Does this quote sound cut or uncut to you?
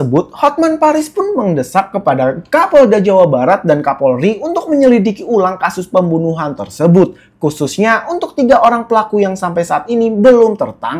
uncut